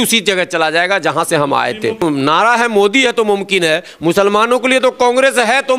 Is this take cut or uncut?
cut